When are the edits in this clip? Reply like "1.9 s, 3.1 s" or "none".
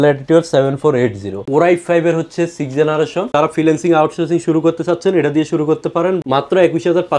1.4 s, 3.3 s, 6.2 s